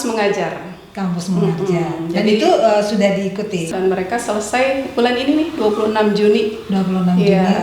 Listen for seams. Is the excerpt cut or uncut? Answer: cut